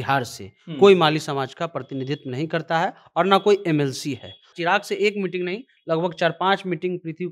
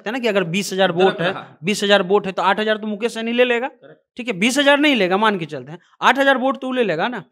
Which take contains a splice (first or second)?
first